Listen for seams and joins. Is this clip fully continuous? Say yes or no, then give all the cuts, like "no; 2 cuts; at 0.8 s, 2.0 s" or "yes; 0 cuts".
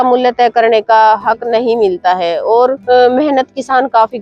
no; 1 cut; at 2.8 s